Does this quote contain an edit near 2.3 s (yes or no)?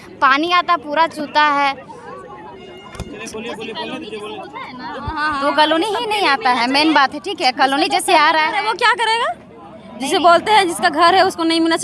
no